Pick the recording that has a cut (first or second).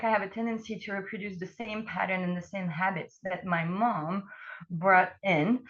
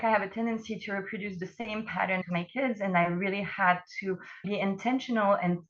second